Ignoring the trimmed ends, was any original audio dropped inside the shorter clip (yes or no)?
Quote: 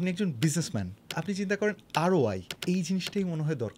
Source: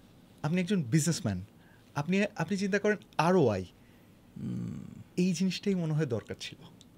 yes